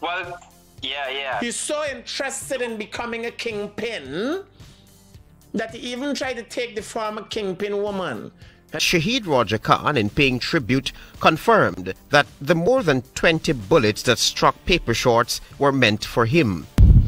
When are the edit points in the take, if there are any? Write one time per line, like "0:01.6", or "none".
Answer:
0:08.8